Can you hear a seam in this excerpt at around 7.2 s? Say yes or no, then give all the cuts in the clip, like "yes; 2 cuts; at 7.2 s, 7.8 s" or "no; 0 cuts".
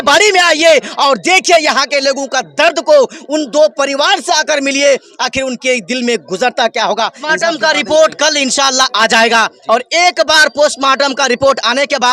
yes; 1 cut; at 7.2 s